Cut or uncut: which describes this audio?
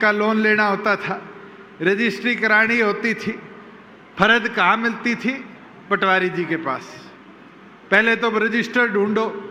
uncut